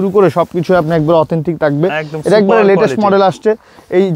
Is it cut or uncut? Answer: uncut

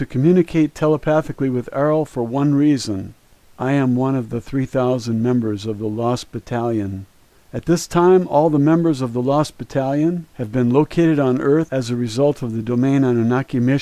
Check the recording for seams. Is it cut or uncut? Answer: cut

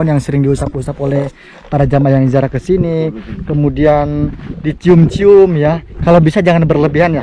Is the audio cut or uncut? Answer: cut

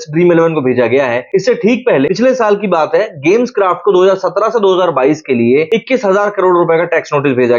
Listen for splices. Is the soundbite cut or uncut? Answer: uncut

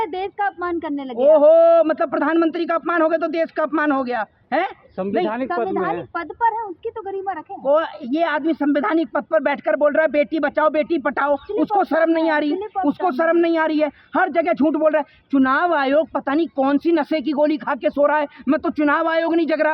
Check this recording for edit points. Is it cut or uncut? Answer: uncut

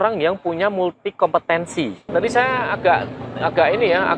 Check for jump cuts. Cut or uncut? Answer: cut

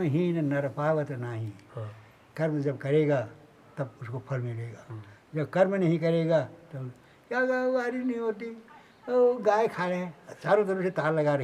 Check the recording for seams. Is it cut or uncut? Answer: uncut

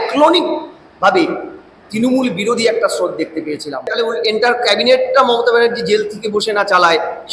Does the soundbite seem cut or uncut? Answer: cut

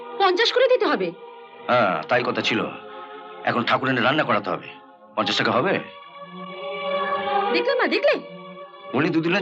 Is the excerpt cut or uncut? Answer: uncut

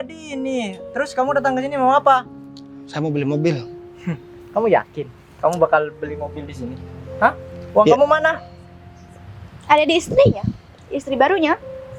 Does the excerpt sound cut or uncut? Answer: uncut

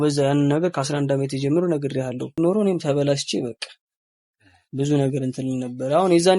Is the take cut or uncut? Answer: cut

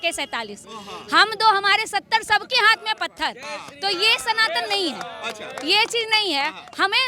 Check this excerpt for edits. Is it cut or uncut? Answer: uncut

